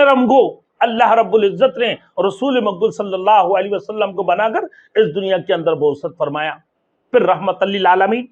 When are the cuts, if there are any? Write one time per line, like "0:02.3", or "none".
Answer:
none